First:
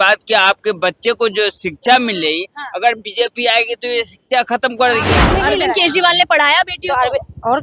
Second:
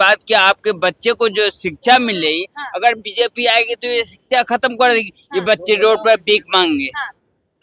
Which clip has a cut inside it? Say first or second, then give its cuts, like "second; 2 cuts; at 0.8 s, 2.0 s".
first; 1 cut; at 5.2 s